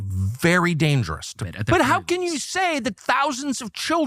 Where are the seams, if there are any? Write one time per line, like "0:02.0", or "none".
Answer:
0:01.4

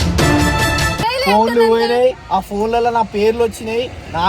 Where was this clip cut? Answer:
0:00.9

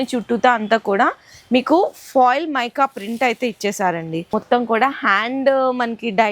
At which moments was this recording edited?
0:04.3

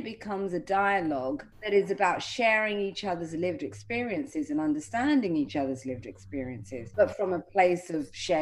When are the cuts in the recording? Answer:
0:01.5
0:06.8

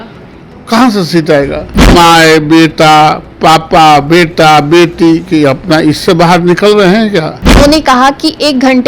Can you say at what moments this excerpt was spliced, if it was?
0:01.9
0:07.6

